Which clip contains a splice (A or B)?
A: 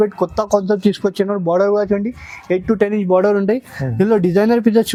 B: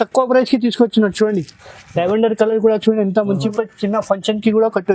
B